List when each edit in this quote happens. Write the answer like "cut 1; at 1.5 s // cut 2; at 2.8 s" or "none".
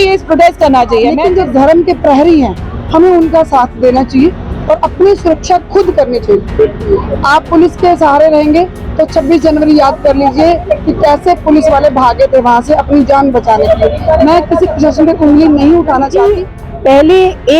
cut 1; at 1.3 s // cut 2; at 16.3 s